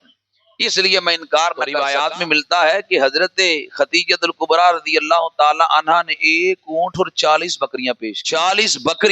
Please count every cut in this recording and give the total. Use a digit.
2